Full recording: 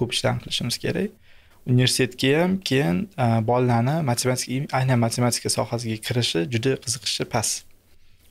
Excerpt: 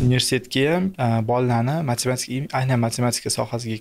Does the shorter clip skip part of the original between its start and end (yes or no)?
yes